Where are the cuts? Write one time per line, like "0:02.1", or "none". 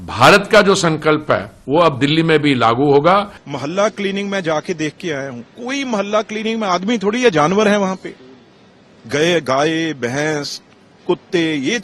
0:03.4